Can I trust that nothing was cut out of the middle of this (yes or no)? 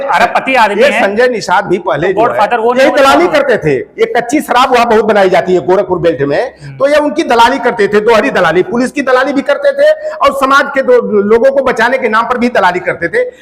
yes